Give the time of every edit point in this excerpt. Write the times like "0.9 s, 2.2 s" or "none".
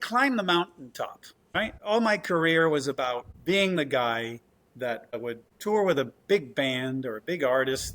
1.3 s, 3.3 s, 5.2 s

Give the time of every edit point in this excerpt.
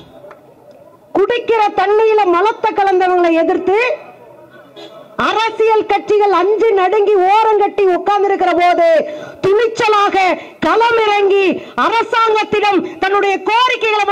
none

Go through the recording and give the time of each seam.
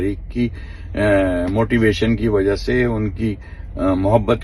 none

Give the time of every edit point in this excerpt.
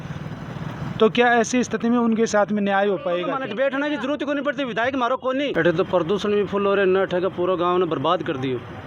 3.4 s, 5.5 s

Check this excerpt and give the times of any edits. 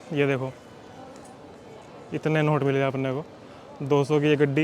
none

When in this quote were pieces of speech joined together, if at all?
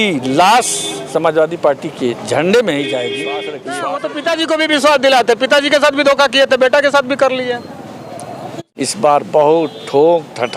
3.6 s, 8.5 s

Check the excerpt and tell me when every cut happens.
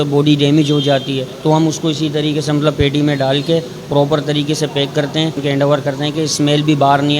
1.3 s, 5.4 s

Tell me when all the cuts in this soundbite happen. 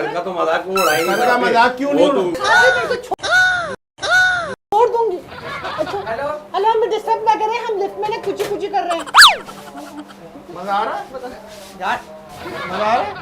2.3 s

